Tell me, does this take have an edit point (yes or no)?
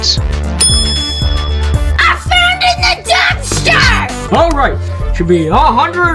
yes